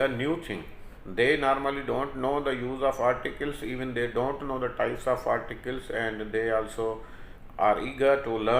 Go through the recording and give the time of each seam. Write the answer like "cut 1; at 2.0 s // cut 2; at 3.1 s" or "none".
none